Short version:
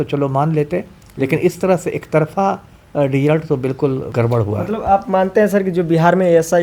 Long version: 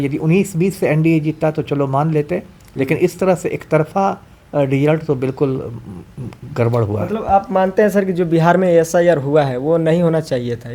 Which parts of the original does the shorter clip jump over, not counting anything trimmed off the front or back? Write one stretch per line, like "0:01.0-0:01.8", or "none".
0:05.6-0:06.5